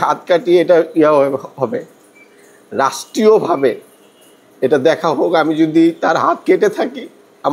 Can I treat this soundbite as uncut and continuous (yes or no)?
yes